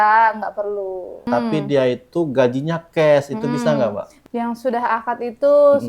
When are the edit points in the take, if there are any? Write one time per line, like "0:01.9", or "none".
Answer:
0:01.2
0:04.1